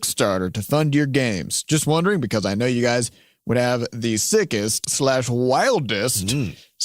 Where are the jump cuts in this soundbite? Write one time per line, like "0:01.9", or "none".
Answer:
0:04.8